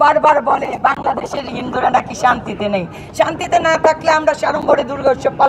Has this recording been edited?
no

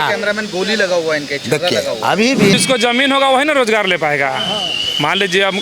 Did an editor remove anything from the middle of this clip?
yes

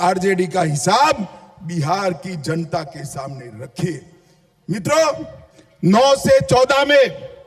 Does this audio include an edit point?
no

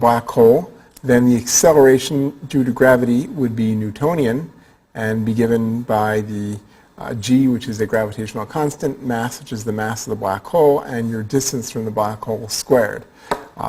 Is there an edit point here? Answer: no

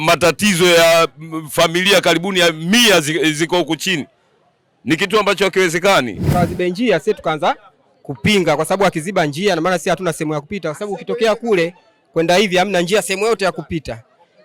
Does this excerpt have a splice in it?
yes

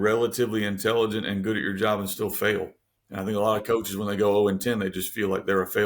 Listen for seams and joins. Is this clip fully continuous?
yes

